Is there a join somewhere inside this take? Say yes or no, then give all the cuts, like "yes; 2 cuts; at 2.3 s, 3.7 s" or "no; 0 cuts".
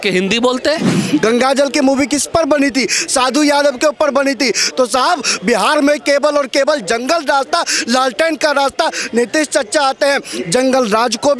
yes; 1 cut; at 1.0 s